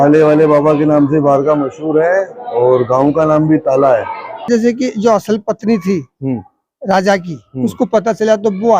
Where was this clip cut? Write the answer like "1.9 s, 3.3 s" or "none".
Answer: 4.5 s